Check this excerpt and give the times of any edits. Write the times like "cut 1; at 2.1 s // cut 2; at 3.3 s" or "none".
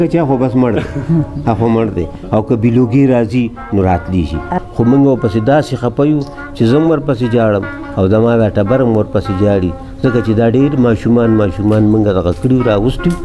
cut 1; at 4.5 s